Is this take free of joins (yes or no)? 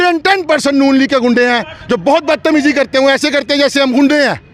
yes